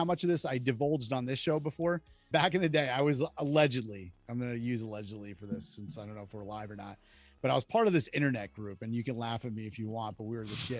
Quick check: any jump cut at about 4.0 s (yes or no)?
no